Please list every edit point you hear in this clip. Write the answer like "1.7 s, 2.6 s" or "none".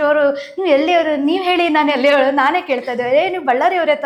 none